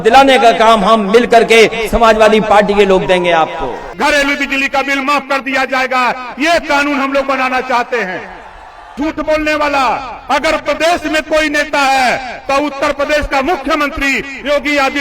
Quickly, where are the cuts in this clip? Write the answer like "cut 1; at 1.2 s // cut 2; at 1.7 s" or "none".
cut 1; at 3.9 s // cut 2; at 9.0 s

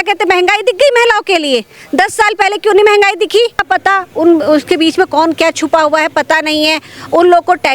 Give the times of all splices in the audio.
cut 1; at 3.6 s

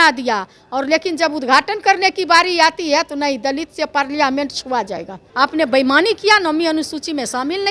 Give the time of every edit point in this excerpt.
cut 1; at 5.2 s

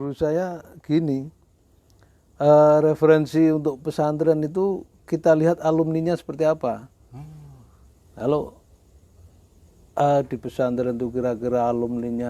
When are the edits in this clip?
none

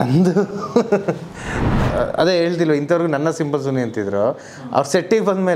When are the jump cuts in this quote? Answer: cut 1; at 1.9 s

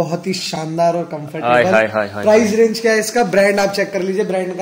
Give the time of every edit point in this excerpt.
none

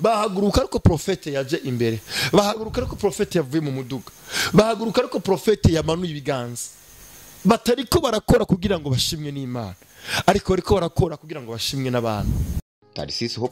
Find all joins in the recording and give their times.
cut 1; at 12.5 s

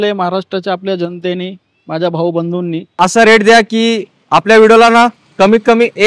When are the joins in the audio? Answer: cut 1; at 3.0 s

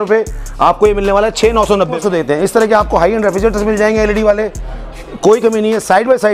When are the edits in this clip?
cut 1; at 2.0 s

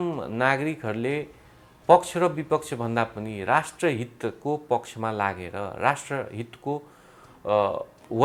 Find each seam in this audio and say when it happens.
none

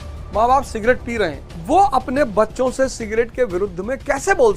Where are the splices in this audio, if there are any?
cut 1; at 1.5 s

